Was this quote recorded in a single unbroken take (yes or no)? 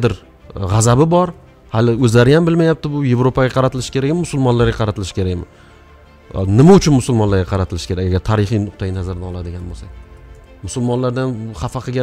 yes